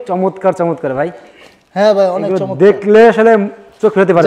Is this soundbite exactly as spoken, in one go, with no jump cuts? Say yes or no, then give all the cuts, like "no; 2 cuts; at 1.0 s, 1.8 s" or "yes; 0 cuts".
yes; 0 cuts